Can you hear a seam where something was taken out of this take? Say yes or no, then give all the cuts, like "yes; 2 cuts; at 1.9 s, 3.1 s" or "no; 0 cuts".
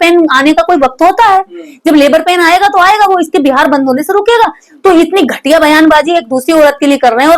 no; 0 cuts